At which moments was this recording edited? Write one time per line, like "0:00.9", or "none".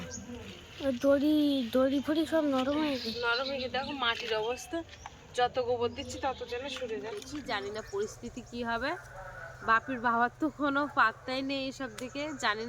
0:07.3